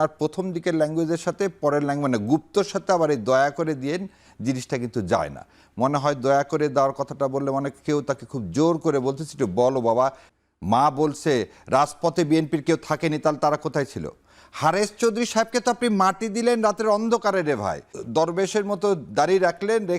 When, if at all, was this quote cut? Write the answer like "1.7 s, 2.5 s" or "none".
10.3 s, 17.9 s